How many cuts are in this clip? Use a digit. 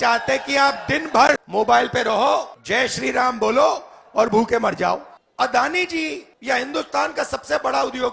4